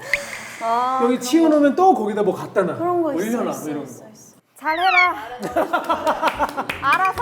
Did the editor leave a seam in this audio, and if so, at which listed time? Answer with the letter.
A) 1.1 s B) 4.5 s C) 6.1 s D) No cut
B